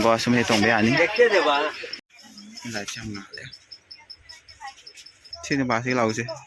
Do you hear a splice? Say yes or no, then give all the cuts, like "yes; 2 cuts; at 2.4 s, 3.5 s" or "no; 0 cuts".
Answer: yes; 2 cuts; at 2.1 s, 5.3 s